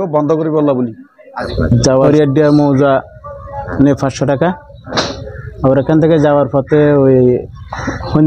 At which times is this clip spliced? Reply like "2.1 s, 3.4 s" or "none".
1.8 s

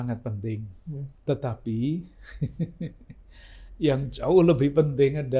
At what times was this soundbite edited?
1.1 s

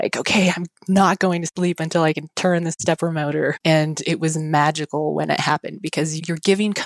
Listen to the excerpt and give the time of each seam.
3.6 s

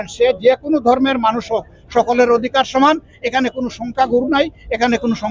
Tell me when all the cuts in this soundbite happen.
none

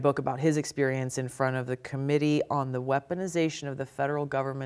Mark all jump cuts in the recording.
none

